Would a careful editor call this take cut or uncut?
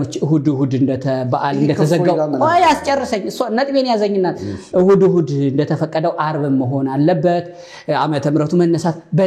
uncut